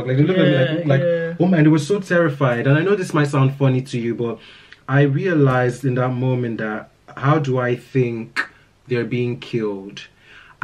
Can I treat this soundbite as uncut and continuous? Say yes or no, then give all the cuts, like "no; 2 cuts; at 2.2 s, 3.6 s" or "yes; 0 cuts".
yes; 0 cuts